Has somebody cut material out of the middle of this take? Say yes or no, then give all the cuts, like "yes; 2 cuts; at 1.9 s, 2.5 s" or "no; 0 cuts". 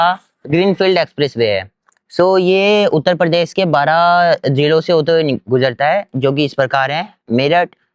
no; 0 cuts